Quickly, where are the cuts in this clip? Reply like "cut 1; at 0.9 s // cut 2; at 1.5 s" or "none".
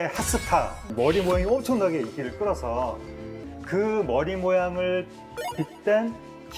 cut 1; at 0.8 s // cut 2; at 3.3 s